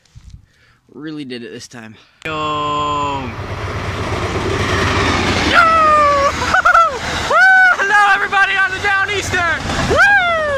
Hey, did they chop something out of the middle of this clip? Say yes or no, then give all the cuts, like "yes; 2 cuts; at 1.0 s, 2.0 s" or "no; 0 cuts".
yes; 1 cut; at 2.2 s